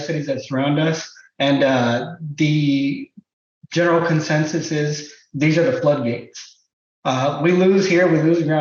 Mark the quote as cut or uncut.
uncut